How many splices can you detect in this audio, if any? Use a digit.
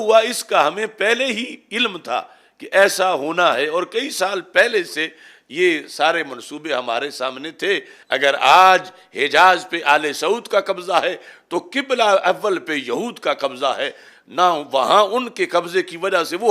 1